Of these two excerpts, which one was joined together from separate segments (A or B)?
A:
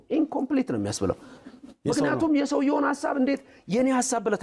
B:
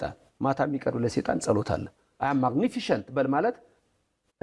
B